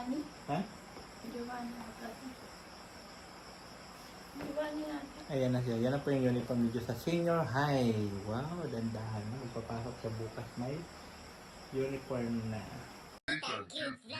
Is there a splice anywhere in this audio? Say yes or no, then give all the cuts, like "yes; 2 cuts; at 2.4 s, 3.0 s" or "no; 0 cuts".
yes; 1 cut; at 13.2 s